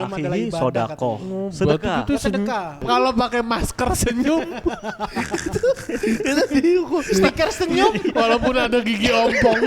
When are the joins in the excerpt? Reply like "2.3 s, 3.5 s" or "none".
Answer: 2.8 s